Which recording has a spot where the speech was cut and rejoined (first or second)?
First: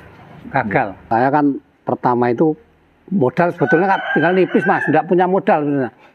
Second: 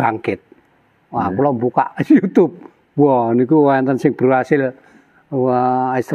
first